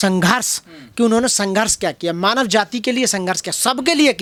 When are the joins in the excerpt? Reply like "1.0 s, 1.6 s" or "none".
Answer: none